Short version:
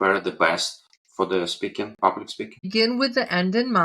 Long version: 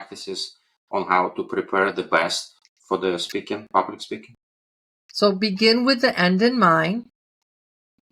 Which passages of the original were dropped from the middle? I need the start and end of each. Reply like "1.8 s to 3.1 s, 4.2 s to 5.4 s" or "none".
4.4 s to 5.5 s